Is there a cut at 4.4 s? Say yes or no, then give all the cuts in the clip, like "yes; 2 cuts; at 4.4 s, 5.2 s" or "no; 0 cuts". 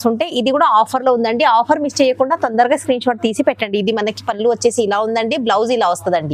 no; 0 cuts